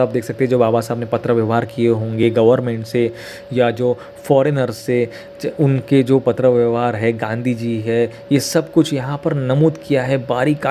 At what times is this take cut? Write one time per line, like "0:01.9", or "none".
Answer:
none